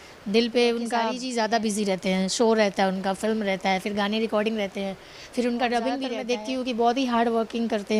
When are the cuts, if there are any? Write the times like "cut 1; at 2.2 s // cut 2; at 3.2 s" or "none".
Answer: cut 1; at 1.2 s // cut 2; at 6.1 s